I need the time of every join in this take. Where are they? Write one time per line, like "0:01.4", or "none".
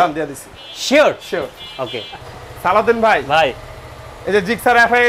none